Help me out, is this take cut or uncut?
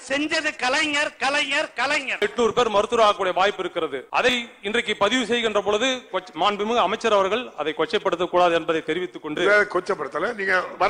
cut